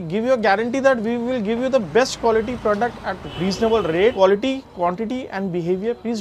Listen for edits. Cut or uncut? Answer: cut